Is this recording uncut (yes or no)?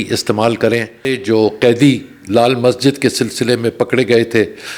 no